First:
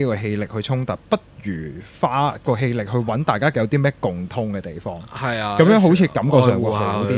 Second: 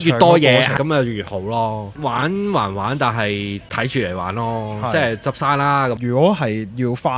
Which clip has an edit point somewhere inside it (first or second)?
second